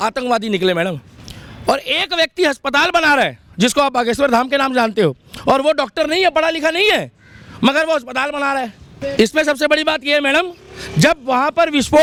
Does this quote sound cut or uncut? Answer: uncut